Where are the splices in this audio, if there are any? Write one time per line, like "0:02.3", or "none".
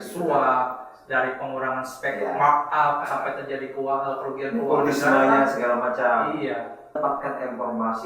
0:07.0